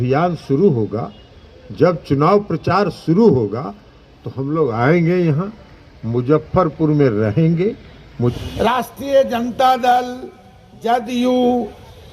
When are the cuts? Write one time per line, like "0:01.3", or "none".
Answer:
0:08.3